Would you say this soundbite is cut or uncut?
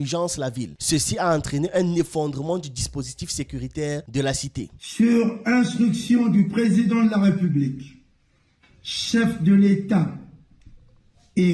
uncut